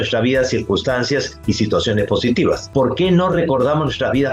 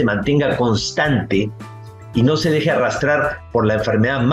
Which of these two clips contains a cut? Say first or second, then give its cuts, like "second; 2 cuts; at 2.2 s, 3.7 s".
first; 1 cut; at 2.6 s